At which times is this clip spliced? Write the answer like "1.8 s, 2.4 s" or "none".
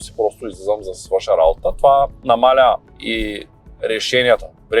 2.2 s, 2.9 s